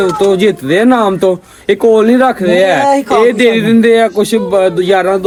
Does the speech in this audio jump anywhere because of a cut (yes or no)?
no